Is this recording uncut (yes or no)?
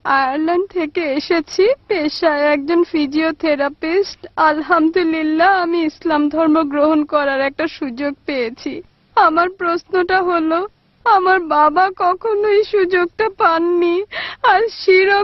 yes